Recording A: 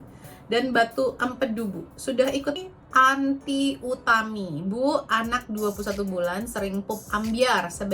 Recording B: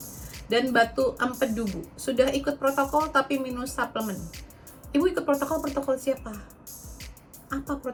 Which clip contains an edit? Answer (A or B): A